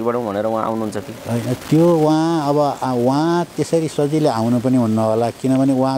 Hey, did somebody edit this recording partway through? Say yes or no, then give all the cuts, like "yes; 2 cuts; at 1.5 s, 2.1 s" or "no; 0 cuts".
no; 0 cuts